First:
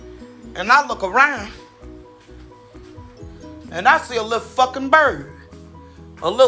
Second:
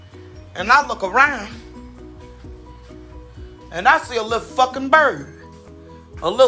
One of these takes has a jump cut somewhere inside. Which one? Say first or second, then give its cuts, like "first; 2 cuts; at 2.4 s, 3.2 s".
second; 2 cuts; at 1.5 s, 3.7 s